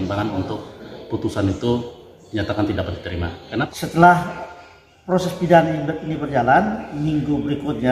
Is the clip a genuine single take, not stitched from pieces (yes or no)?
no